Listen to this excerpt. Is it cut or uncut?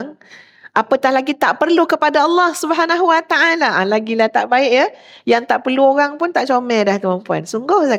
uncut